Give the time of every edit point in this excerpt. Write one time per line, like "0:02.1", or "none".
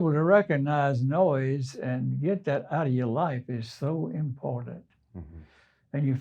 none